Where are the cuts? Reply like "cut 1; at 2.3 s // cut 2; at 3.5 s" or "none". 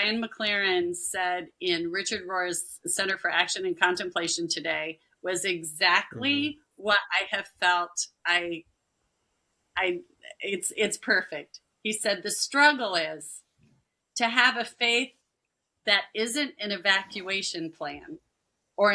none